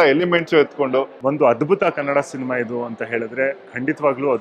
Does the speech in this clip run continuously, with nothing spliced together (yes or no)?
no